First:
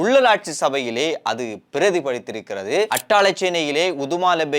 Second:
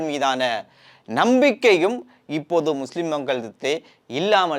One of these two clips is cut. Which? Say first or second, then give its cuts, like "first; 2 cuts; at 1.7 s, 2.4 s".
first; 1 cut; at 2.9 s